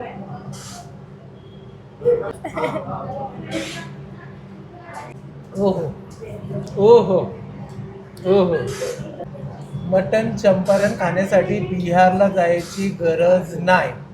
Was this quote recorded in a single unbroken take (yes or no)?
no